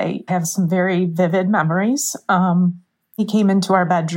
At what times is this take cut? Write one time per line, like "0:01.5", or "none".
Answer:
0:03.2